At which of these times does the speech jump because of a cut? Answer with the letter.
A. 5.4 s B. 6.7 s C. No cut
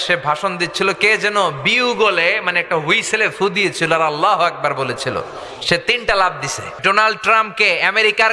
B